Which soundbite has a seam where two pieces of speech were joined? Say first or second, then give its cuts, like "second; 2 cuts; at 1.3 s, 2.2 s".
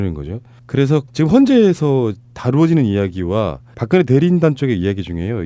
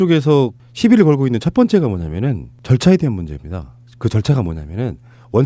first; 1 cut; at 2.5 s